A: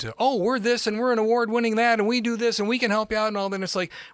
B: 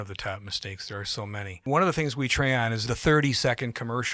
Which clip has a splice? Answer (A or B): B